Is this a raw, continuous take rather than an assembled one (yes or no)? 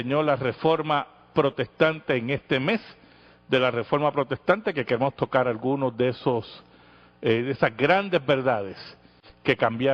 no